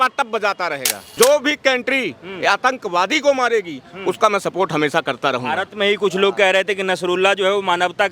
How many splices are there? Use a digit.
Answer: 1